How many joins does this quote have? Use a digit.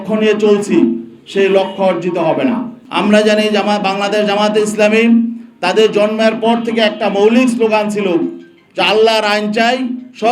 1